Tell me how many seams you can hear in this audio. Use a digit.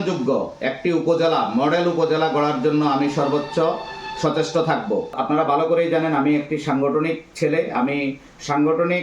1